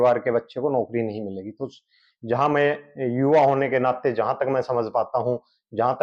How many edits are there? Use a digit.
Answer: 0